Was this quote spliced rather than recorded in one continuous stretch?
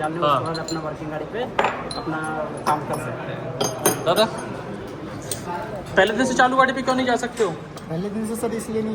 no; 0 cuts

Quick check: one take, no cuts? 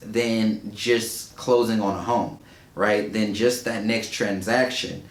yes; 0 cuts

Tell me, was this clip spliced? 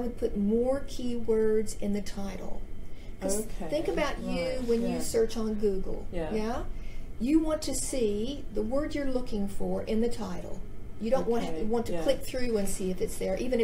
no; 0 cuts

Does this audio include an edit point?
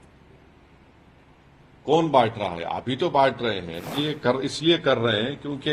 yes; 1 cut; at 3.9 s

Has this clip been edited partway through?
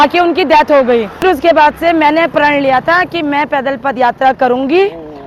yes; 1 cut; at 1.2 s

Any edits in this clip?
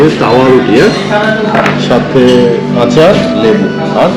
no; 0 cuts

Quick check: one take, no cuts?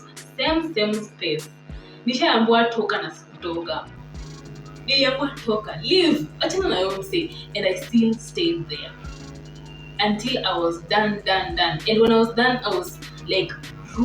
yes; 0 cuts

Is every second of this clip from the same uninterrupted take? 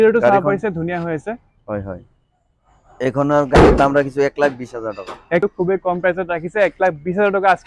no; 2 cuts; at 3.0 s, 5.4 s

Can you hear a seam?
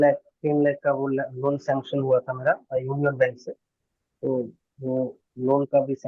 no; 0 cuts

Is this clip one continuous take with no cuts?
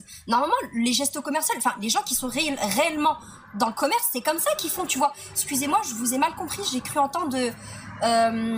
yes; 0 cuts

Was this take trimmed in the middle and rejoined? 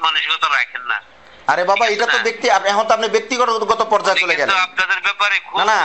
no; 0 cuts

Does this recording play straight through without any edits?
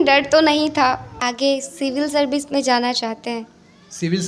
no; 1 cut; at 1.3 s

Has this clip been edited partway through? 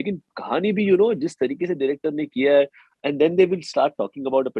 no; 0 cuts

